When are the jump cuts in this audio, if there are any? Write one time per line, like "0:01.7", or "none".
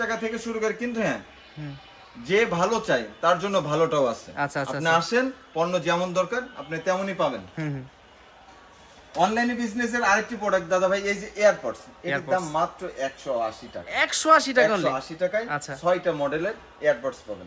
none